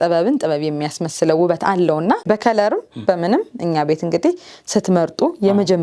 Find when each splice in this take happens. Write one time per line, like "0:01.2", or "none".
0:02.2